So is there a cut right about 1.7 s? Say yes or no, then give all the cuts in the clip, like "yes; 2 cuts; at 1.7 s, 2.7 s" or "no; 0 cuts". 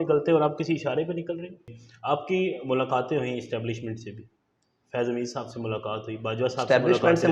yes; 1 cut; at 1.7 s